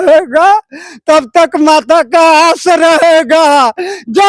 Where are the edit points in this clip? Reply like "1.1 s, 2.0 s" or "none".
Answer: none